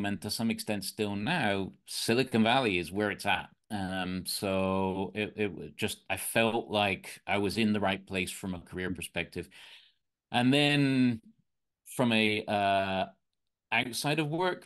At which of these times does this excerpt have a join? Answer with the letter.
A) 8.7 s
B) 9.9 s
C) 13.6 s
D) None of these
D